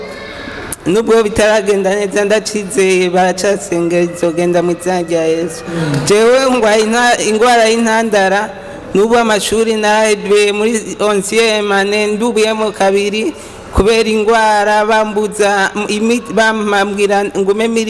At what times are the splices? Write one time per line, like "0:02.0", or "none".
none